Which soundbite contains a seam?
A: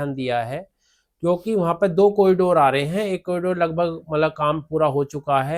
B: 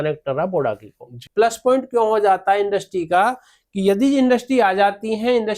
B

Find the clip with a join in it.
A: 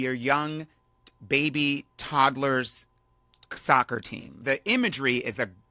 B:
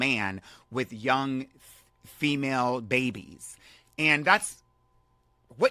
A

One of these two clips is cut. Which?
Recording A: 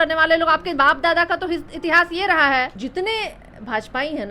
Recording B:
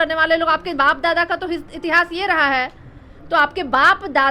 A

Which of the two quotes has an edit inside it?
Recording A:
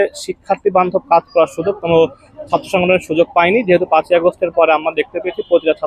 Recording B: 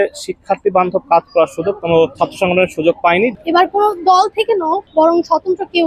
B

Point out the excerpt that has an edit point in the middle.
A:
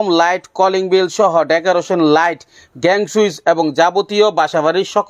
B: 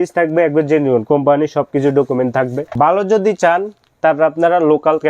B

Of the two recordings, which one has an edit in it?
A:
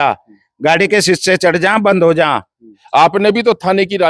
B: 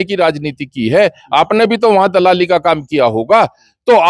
A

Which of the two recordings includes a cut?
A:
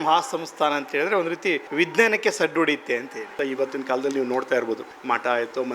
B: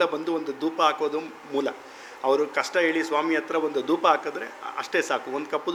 A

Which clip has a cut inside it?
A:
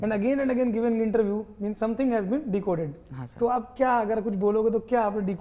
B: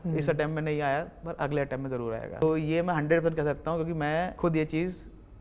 B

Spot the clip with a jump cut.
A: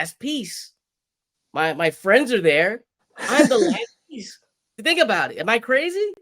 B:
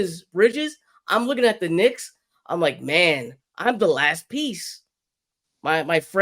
A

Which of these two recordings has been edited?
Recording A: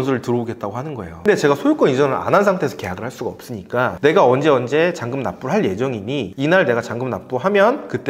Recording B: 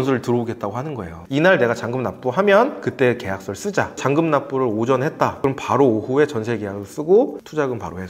B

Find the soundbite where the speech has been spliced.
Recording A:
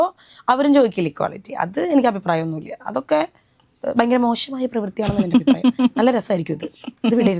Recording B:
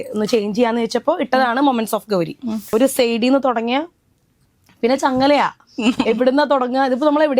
B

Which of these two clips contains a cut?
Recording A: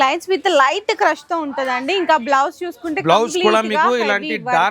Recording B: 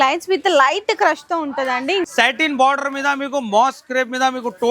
B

